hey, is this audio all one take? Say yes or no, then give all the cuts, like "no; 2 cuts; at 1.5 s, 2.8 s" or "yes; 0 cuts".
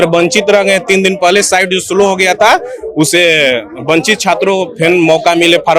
yes; 0 cuts